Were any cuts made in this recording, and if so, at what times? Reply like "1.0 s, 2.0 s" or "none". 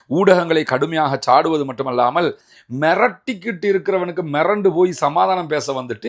2.5 s